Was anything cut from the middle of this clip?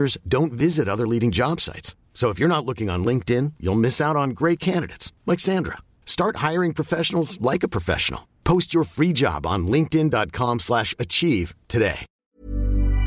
yes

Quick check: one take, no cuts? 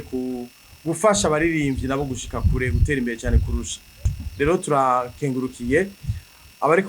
no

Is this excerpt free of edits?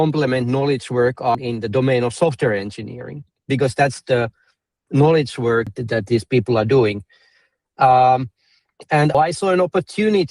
no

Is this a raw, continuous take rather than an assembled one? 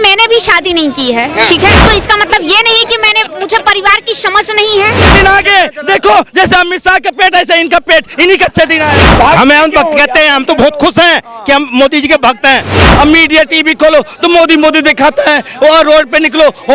no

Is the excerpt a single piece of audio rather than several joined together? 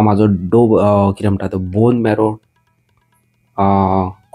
yes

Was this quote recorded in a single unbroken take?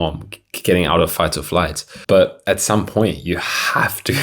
no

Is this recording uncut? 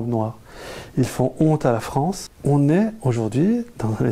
no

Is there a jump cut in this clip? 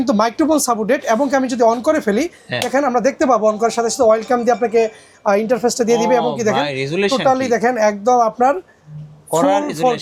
no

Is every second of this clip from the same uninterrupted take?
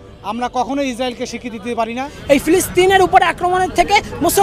no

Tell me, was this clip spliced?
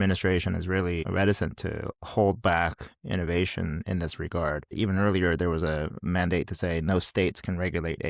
yes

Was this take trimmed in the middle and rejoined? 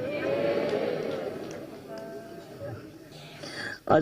yes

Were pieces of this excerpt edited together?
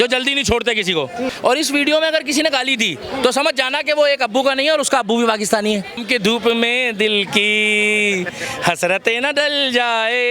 yes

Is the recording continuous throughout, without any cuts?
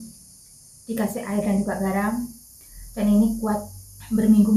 yes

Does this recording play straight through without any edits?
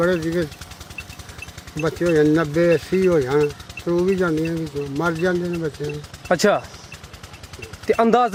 yes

